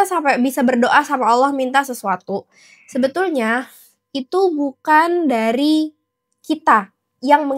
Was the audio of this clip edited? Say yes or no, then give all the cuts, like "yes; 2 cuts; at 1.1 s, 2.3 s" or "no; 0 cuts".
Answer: no; 0 cuts